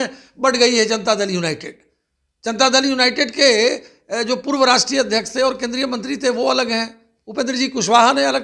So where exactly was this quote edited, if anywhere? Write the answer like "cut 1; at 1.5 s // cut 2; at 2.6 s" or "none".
none

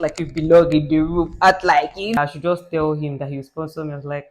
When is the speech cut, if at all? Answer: cut 1; at 2.2 s

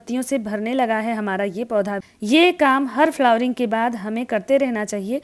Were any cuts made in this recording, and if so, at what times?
cut 1; at 2.0 s

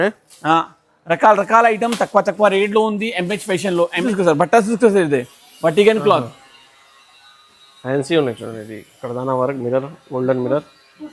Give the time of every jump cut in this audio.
cut 1; at 4.0 s

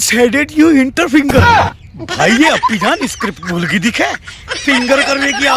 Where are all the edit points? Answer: none

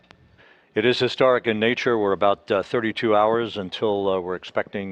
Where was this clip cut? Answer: cut 1; at 4.0 s

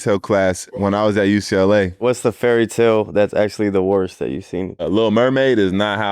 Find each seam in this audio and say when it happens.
cut 1; at 2.0 s // cut 2; at 4.9 s

